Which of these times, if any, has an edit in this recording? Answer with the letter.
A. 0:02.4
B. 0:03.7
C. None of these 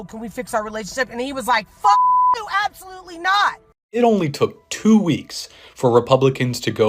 B